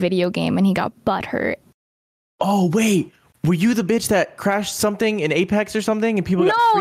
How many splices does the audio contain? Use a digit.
0